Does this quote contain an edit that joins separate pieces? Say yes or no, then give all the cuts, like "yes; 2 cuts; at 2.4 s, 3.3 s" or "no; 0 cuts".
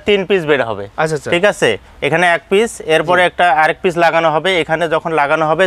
no; 0 cuts